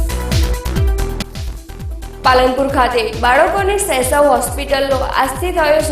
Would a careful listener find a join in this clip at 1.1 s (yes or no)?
yes